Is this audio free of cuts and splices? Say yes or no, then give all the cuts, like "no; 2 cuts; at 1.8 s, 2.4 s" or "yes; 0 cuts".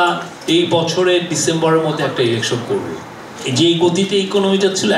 no; 1 cut; at 3.3 s